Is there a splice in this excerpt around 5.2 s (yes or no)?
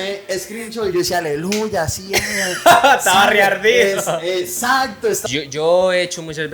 yes